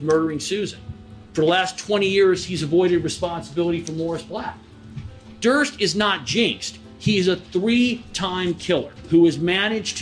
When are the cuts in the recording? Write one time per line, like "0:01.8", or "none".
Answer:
0:09.0